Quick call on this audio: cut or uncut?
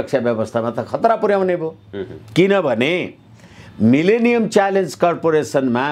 uncut